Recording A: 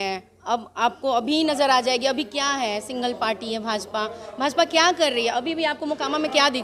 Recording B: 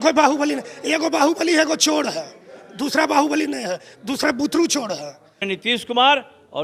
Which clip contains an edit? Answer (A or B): B